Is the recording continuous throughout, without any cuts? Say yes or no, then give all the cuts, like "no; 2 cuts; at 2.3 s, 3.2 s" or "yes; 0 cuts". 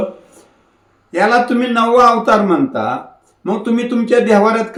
yes; 0 cuts